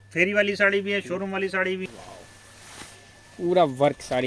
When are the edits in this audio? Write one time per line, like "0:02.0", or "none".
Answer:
0:01.9